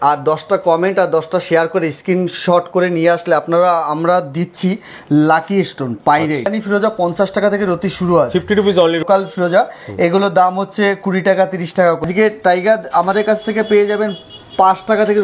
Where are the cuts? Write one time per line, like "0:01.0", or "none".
0:06.5
0:09.0
0:12.1